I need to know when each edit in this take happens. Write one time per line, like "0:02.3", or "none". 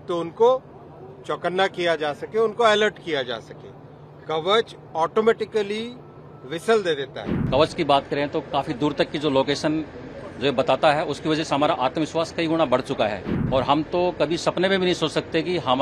0:07.3
0:13.3